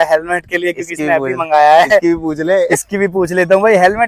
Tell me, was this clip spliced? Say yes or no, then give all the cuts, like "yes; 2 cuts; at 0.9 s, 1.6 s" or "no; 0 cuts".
no; 0 cuts